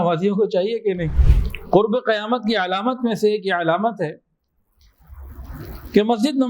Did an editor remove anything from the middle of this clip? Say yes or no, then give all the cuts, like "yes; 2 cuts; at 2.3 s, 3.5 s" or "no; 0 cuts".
yes; 1 cut; at 1.1 s